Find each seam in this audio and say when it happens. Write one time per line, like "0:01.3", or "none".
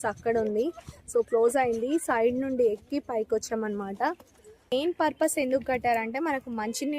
0:04.7